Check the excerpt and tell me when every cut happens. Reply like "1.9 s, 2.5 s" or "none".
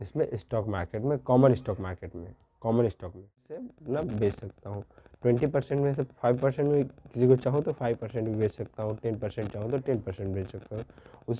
3.7 s